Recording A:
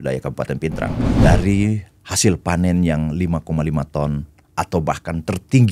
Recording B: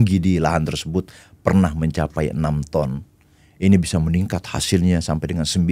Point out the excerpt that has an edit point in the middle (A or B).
A